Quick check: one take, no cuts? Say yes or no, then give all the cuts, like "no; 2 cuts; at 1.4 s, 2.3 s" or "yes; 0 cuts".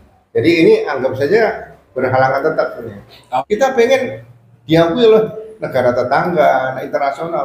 no; 1 cut; at 3.2 s